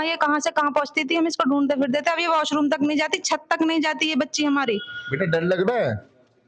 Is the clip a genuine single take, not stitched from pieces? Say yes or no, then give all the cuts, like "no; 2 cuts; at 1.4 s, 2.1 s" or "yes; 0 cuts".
yes; 0 cuts